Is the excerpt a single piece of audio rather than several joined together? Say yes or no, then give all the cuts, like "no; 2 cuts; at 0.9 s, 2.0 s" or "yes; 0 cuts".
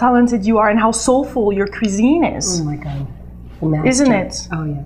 yes; 0 cuts